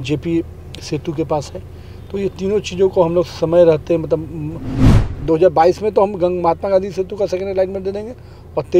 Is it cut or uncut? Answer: cut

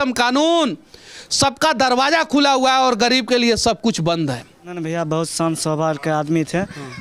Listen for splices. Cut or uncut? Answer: cut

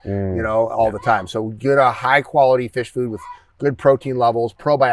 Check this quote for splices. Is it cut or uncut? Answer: uncut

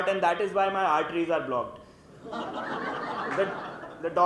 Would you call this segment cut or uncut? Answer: uncut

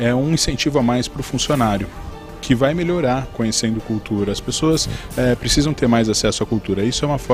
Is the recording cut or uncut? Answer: uncut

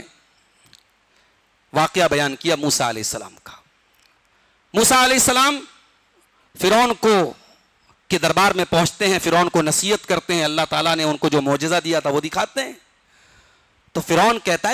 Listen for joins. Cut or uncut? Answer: uncut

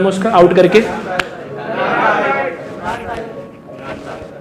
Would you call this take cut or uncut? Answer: uncut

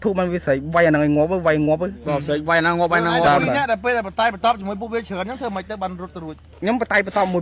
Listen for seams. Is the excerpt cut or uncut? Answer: cut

